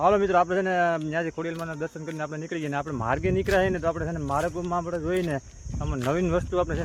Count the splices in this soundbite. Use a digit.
0